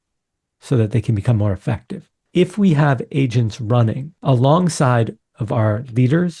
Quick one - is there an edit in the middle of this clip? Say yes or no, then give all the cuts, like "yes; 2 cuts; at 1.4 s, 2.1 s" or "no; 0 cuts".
yes; 2 cuts; at 2.1 s, 4.1 s